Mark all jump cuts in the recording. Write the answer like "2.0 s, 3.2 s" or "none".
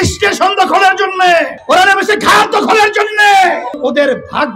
1.6 s, 3.8 s